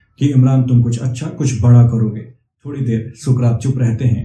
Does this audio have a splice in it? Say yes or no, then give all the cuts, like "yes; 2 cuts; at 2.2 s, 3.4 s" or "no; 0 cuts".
yes; 1 cut; at 2.5 s